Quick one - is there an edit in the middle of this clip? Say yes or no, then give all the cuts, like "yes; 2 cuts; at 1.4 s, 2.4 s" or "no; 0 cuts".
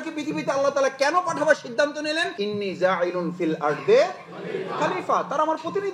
yes; 1 cut; at 2.3 s